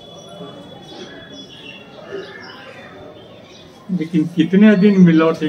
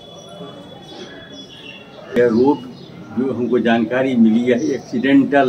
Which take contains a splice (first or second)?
second